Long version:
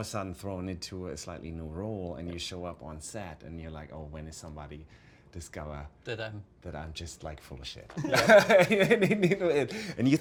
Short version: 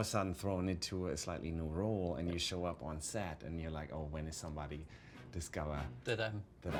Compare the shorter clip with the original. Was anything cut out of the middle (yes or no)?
no